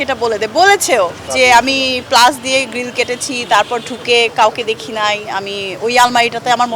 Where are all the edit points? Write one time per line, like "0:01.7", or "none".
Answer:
none